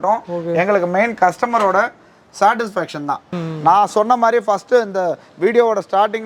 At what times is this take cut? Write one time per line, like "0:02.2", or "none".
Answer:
0:03.3